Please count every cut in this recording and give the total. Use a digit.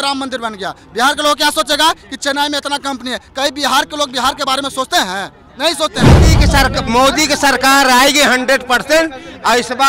1